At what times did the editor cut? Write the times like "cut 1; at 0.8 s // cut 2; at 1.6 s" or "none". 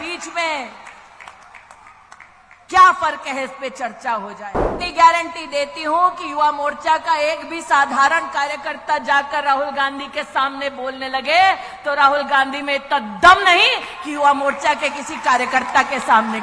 cut 1; at 4.7 s